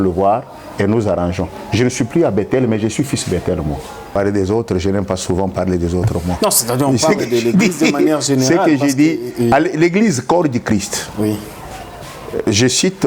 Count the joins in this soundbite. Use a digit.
1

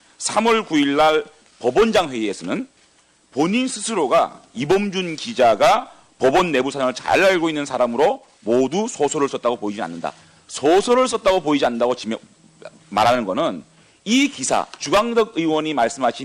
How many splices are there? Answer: 1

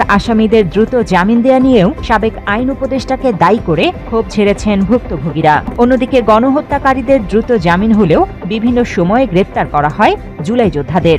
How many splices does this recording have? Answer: 1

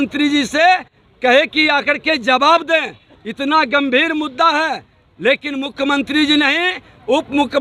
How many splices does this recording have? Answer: 0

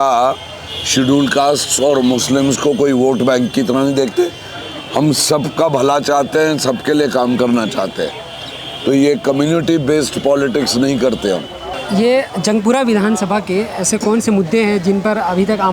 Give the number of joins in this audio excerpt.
0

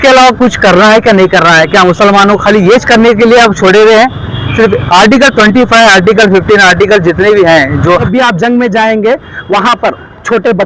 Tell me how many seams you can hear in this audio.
1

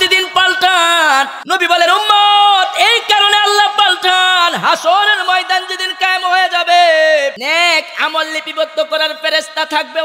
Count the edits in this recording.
2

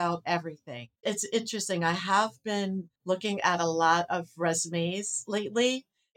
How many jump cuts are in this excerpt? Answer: 2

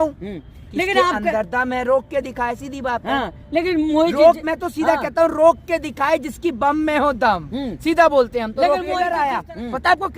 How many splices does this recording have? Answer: 1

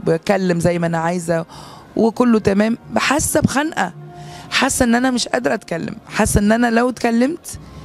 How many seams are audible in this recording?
0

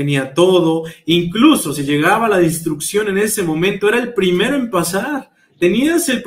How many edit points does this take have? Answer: 0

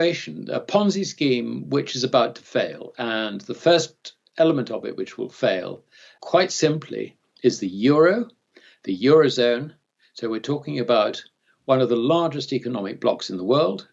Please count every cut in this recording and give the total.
0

